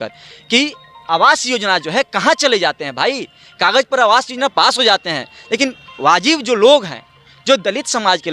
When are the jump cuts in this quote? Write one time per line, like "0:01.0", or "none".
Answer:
none